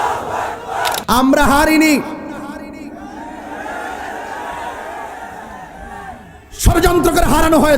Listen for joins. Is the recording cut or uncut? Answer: cut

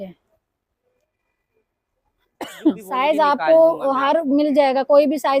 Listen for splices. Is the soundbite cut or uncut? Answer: cut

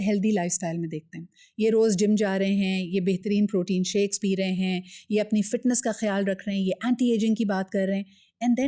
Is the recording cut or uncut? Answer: uncut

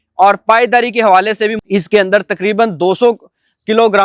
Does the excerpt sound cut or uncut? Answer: cut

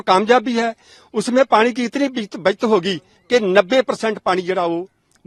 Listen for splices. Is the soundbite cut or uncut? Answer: uncut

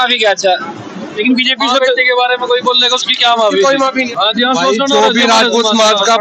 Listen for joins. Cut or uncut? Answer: cut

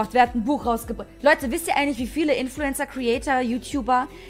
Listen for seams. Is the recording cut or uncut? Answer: uncut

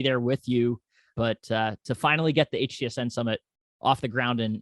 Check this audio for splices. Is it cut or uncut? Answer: cut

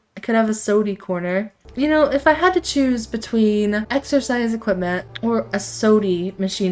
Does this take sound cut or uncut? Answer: cut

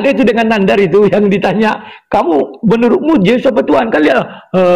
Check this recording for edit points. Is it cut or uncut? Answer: uncut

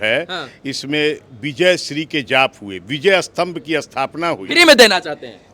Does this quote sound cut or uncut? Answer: cut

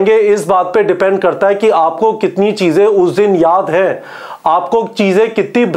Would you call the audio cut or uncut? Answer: uncut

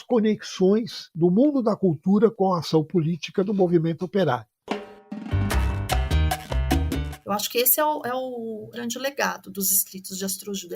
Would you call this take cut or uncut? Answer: cut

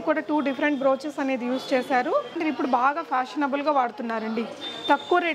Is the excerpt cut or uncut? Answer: cut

